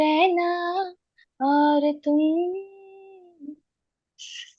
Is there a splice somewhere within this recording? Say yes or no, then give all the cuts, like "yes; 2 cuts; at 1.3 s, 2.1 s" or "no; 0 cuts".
no; 0 cuts